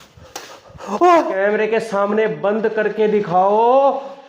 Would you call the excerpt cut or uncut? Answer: cut